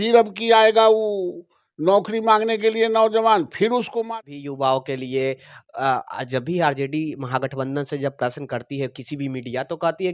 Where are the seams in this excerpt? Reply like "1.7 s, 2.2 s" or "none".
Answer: 4.0 s